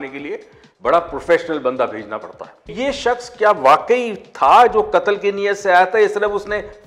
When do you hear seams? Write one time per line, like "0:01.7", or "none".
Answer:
0:02.7